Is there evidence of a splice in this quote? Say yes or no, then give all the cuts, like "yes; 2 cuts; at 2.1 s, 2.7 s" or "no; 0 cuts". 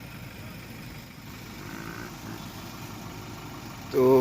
yes; 1 cut; at 1.2 s